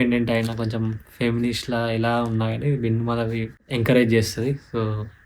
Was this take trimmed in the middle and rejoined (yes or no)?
yes